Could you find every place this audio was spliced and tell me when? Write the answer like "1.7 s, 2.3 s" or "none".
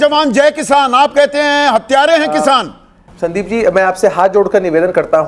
3.0 s

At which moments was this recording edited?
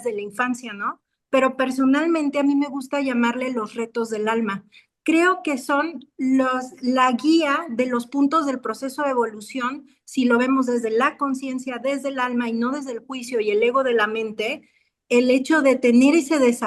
none

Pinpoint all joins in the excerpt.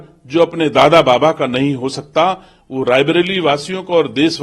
none

